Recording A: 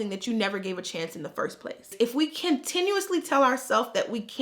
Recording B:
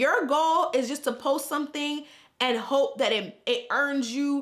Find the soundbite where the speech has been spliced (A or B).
A